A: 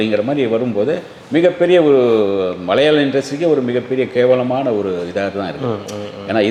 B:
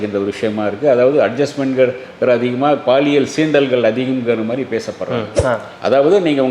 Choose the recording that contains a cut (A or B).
B